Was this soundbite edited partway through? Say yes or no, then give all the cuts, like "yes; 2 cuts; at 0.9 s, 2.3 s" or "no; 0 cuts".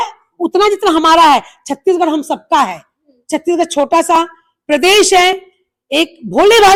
no; 0 cuts